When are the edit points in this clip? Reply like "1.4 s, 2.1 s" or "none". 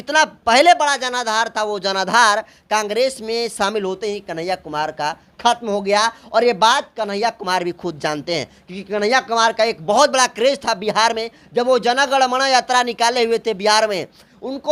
none